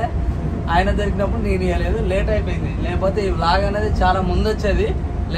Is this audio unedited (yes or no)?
yes